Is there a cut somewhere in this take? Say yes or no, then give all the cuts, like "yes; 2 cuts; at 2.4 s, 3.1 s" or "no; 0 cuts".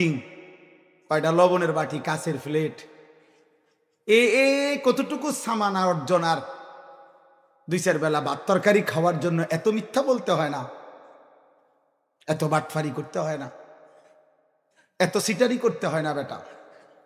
no; 0 cuts